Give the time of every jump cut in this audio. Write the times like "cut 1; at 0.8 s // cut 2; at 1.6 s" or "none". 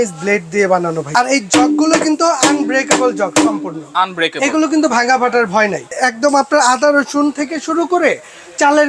cut 1; at 1.1 s // cut 2; at 5.9 s